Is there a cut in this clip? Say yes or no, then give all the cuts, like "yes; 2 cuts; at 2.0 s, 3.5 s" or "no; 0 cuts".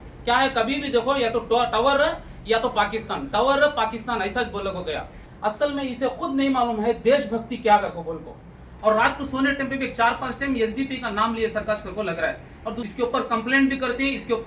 yes; 3 cuts; at 5.3 s, 8.6 s, 12.8 s